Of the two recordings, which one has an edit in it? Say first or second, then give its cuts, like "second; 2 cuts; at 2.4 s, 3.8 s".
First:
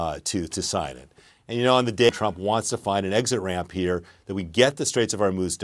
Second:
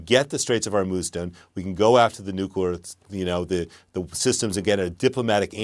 first; 1 cut; at 2.1 s